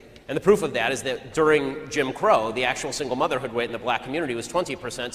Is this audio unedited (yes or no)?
no